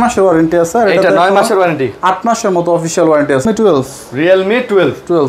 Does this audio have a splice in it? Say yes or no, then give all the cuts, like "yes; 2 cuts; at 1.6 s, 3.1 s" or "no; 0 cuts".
yes; 1 cut; at 3.4 s